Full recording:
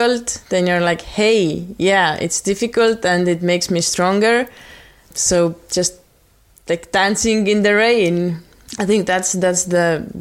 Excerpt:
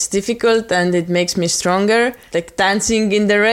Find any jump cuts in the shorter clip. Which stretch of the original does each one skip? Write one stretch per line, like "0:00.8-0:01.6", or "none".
0:04.5-0:06.6